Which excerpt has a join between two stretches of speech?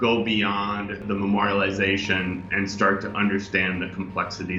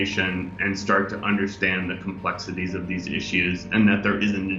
first; 1 cut; at 1.0 s

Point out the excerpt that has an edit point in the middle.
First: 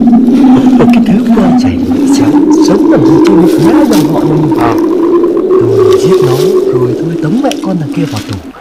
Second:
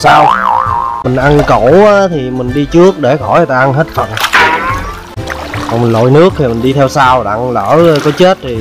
second; 2 cuts; at 1.0 s, 5.1 s

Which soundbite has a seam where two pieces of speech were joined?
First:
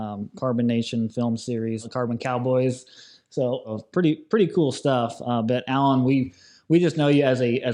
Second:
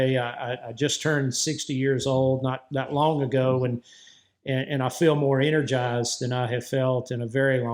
first; 2 cuts; at 1.8 s, 3.7 s

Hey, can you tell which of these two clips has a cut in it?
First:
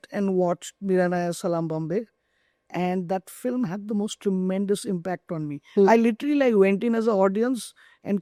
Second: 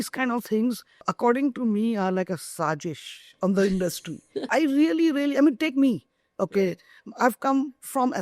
second; 2 cuts; at 1.1 s, 4.5 s

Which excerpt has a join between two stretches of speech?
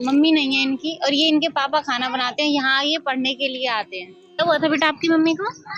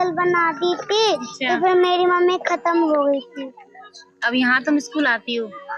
first; 1 cut; at 4.3 s

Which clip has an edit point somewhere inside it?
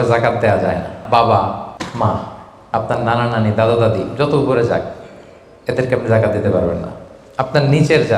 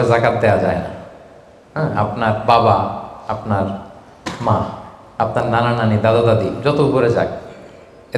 first; 2 cuts; at 1.0 s, 1.7 s

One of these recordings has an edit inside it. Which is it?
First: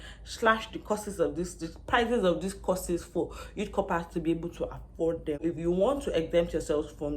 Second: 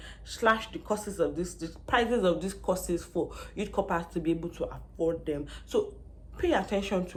first; 1 cut; at 5.4 s

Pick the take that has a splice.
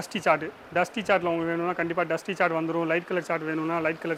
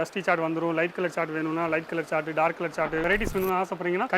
second; 1 cut; at 3.0 s

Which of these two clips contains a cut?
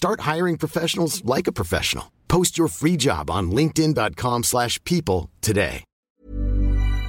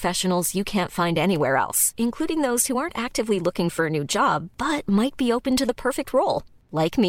first; 1 cut; at 6.1 s

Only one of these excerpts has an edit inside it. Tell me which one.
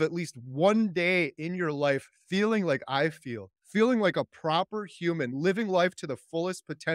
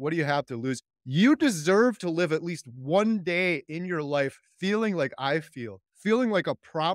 second; 1 cut; at 0.9 s

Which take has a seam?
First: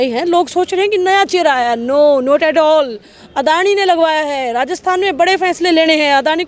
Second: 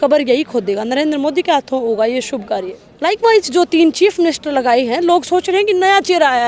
second; 1 cut; at 2.8 s

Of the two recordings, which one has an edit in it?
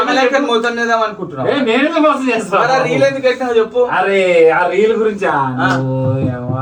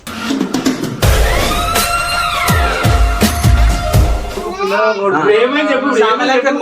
second; 1 cut; at 4.4 s

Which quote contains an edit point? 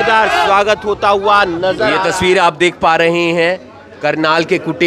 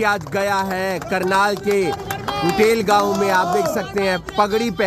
first; 1 cut; at 1.9 s

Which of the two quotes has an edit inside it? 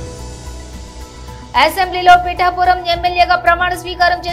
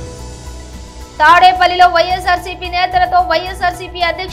first; 1 cut; at 1.0 s

